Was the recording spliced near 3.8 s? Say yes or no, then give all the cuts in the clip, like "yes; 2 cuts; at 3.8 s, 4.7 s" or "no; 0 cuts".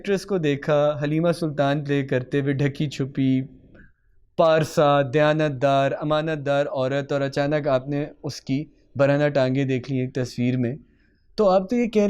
no; 0 cuts